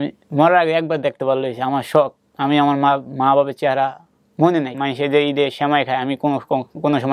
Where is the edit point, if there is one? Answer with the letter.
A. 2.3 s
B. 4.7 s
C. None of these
B